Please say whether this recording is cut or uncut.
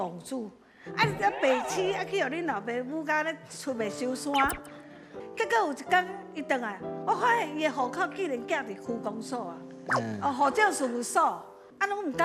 uncut